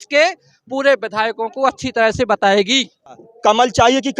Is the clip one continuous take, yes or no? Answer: no